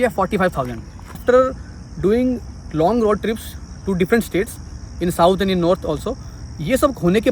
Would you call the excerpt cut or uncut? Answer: cut